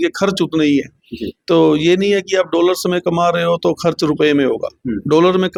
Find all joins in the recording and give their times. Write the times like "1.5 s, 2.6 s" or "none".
none